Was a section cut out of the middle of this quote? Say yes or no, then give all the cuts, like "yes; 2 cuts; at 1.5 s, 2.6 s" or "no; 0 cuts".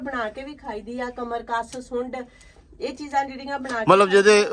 no; 0 cuts